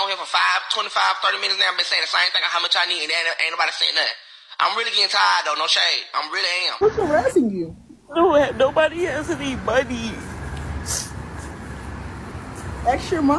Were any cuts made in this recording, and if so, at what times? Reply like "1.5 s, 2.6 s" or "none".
6.8 s